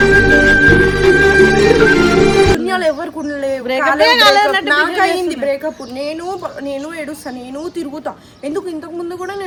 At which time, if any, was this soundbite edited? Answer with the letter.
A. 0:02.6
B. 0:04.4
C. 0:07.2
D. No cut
D